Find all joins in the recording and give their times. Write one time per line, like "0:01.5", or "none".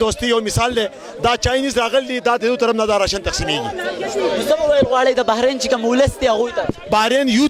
none